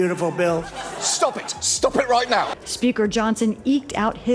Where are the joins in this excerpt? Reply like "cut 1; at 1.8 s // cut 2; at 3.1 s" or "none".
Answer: cut 1; at 2.5 s